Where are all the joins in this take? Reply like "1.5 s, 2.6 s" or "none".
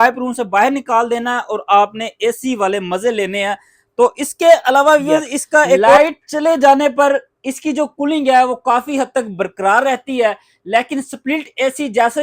6.0 s